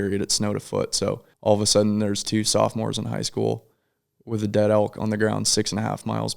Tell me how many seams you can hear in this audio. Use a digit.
1